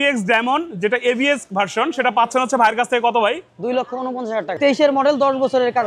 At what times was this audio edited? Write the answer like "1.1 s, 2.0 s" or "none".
4.6 s